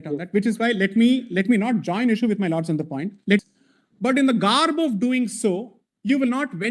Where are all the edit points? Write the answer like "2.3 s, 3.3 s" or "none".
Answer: 3.4 s